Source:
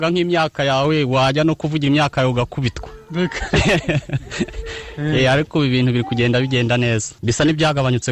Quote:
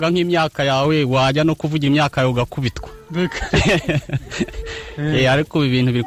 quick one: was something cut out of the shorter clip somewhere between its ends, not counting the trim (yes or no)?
no